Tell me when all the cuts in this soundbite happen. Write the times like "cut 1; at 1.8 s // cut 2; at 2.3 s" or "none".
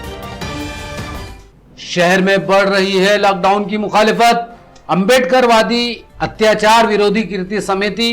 cut 1; at 1.2 s